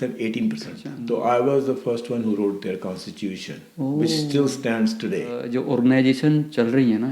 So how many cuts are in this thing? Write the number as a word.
two